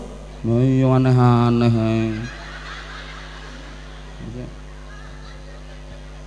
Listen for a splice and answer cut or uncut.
uncut